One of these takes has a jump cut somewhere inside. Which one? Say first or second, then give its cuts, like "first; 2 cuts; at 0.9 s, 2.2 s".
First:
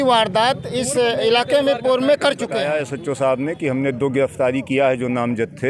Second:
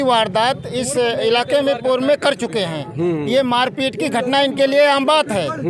first; 1 cut; at 2.5 s